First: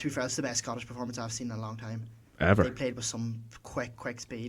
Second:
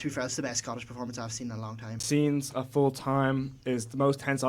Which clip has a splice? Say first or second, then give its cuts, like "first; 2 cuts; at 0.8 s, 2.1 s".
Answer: second; 1 cut; at 2.0 s